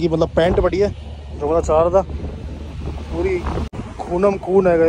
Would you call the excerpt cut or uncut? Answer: cut